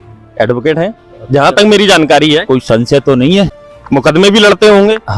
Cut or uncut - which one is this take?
cut